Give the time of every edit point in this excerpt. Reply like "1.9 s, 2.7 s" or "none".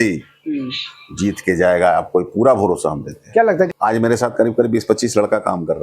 3.7 s